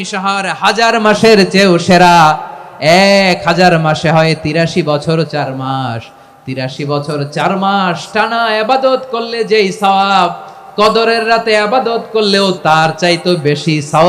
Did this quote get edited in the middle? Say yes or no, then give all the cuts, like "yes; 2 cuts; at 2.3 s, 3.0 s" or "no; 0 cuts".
yes; 1 cut; at 12.6 s